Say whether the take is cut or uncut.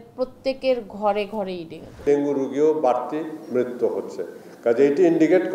cut